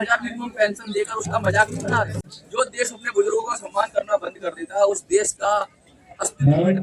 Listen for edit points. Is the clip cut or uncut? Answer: cut